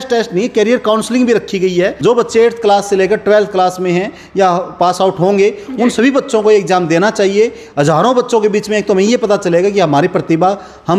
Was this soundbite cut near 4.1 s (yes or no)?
no